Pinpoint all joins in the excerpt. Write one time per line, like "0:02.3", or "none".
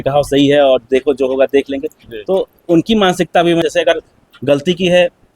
0:03.6